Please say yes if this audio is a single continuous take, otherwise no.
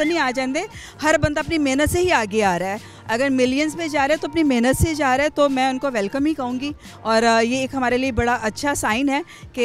yes